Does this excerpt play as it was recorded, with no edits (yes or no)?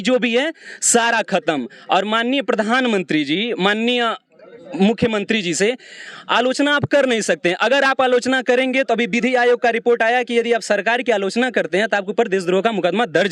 yes